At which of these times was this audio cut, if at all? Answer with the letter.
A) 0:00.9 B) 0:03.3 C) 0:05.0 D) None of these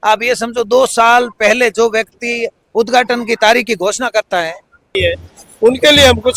C